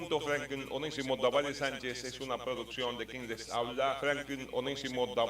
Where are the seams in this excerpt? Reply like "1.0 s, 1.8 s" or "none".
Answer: 4.0 s